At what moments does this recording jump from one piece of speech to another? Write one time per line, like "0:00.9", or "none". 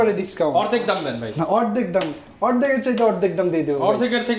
none